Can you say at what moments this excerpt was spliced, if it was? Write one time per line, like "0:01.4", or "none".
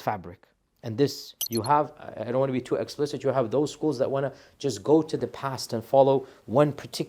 0:01.3